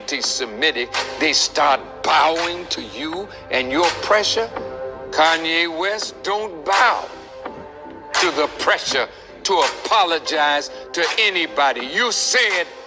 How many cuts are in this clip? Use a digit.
1